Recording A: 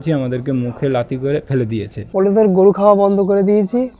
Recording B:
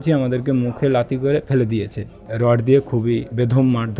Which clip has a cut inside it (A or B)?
A